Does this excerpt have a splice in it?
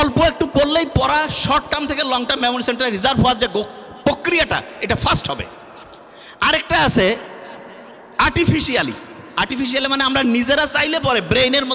no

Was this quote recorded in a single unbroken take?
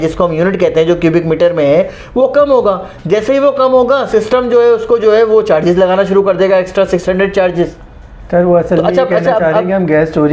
yes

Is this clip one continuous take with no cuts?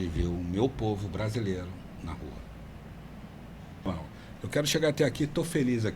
no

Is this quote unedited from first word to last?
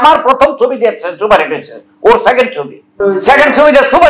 no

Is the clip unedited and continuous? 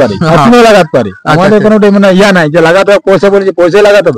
yes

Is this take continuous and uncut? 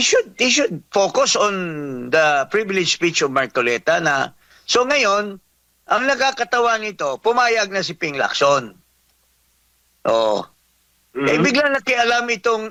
yes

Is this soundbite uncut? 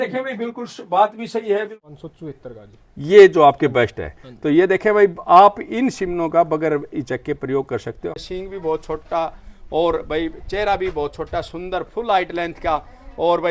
no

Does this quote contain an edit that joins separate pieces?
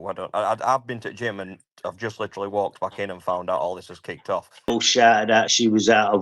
yes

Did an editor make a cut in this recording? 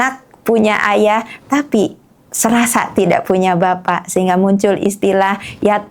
no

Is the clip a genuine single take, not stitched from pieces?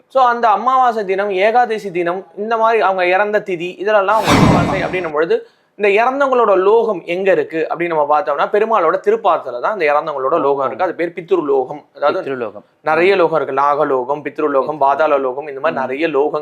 no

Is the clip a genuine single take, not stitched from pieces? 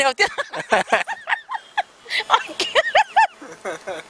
yes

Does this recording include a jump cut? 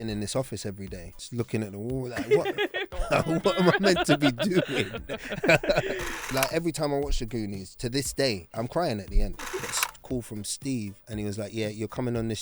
yes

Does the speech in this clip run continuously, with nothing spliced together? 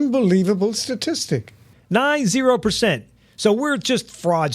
no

